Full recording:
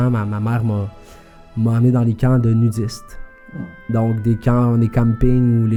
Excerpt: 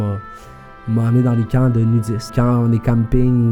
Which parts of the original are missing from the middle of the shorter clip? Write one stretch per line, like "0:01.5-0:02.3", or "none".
0:03.0-0:04.4